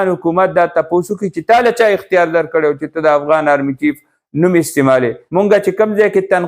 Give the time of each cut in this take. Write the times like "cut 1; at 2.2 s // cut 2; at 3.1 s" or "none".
cut 1; at 5.2 s